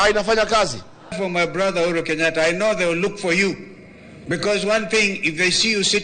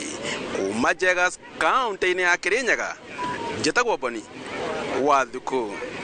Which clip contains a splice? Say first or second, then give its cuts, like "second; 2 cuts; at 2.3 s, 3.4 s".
first; 1 cut; at 1.2 s